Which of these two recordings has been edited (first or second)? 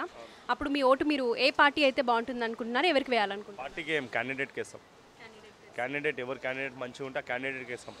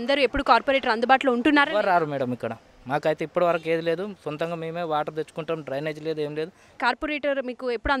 second